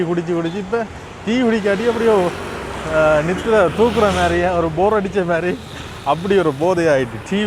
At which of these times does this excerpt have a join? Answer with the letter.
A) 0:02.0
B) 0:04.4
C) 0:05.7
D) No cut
D